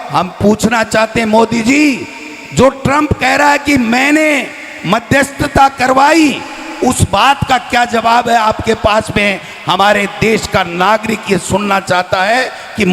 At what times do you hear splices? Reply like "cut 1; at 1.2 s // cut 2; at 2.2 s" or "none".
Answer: none